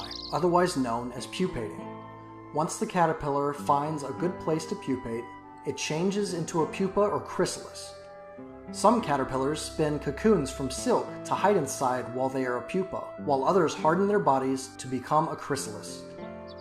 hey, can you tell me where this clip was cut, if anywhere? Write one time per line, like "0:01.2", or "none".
none